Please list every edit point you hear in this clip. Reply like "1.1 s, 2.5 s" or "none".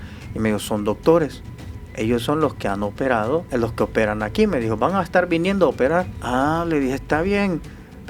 3.5 s, 6.2 s